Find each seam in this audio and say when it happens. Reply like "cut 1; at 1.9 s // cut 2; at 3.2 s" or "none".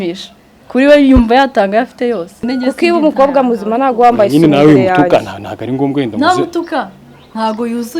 cut 1; at 2.4 s